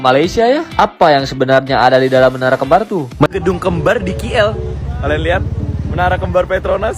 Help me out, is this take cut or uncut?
cut